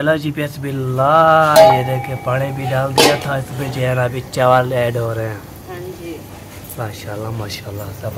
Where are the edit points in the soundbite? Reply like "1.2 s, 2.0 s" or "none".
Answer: none